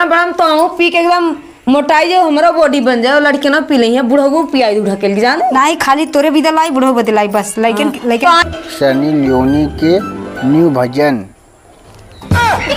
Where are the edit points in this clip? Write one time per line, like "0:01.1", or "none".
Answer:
0:08.4